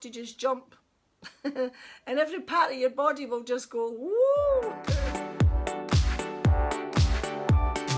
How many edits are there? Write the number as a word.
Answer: one